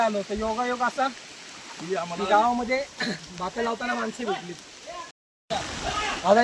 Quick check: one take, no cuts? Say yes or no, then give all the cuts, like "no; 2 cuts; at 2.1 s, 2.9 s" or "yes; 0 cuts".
no; 1 cut; at 5.3 s